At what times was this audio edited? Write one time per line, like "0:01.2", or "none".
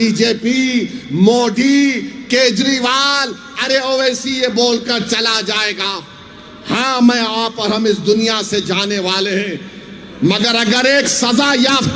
none